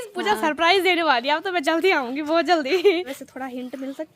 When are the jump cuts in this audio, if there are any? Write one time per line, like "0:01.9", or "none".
0:03.1